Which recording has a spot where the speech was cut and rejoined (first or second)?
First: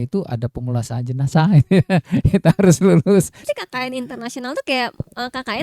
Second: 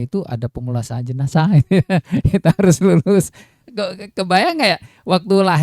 first